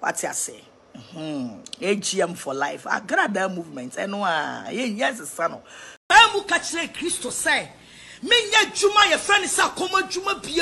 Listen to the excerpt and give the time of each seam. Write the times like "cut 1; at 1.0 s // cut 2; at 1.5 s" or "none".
cut 1; at 6.0 s